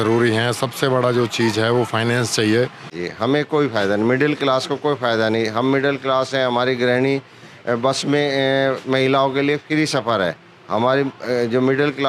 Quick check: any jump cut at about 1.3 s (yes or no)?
no